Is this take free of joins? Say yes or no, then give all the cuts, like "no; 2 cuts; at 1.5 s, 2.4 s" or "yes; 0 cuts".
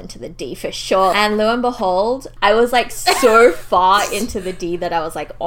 no; 2 cuts; at 1.1 s, 2.3 s